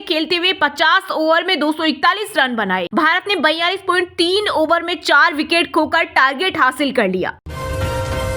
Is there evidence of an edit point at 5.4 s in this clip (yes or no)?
no